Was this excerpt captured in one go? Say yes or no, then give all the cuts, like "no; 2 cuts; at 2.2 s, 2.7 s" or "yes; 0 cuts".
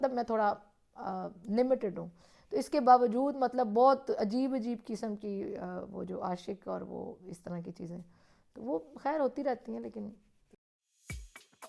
no; 1 cut; at 10.5 s